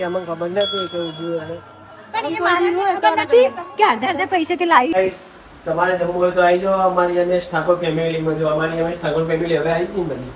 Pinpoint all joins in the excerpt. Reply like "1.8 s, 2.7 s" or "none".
5.0 s